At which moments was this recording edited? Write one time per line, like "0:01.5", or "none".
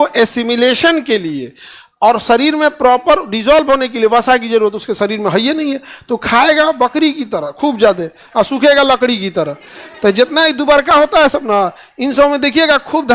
none